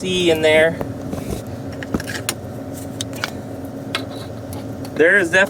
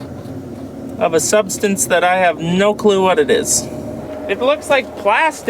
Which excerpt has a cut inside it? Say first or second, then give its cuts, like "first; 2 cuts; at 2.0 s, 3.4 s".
second; 1 cut; at 4.0 s